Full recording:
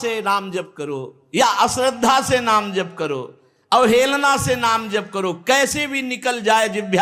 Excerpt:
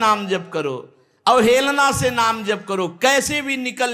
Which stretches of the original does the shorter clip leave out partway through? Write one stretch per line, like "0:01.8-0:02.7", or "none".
none